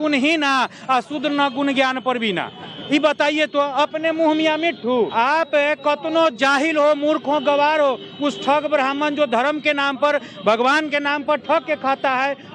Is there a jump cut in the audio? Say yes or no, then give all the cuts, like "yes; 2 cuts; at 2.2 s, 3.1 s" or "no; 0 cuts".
yes; 1 cut; at 5.1 s